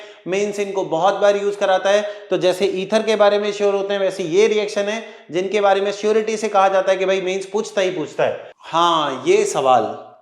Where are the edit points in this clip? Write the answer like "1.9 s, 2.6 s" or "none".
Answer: 8.5 s